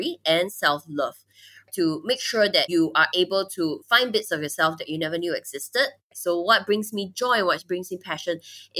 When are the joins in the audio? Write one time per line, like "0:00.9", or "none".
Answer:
0:06.0